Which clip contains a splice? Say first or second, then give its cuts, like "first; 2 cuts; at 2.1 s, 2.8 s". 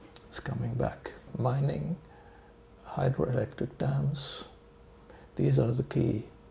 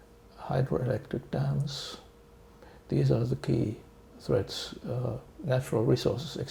first; 1 cut; at 1.3 s